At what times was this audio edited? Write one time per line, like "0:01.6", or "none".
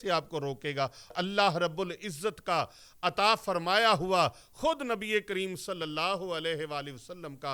0:01.1